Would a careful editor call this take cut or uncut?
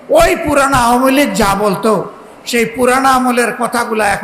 uncut